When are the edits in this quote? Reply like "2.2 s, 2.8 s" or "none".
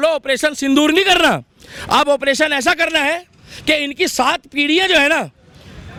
none

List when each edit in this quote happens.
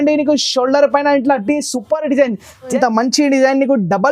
2.6 s

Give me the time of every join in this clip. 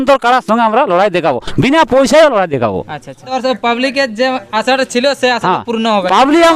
3.3 s

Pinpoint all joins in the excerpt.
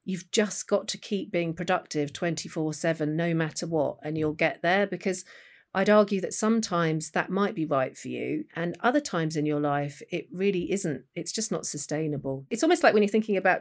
8.5 s, 12.5 s

